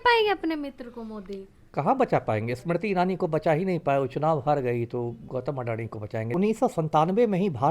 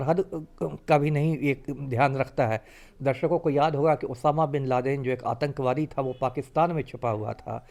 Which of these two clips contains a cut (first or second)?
first